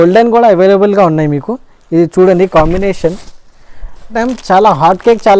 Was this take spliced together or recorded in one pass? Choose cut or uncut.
cut